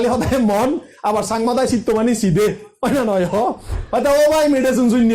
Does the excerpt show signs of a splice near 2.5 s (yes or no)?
no